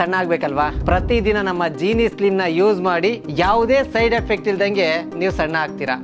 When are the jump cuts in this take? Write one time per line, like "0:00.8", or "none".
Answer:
none

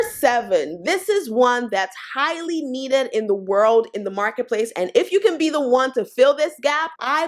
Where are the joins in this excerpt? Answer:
none

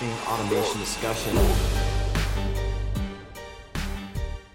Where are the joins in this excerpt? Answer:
none

